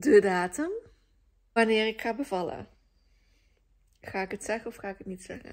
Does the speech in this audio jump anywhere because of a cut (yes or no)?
yes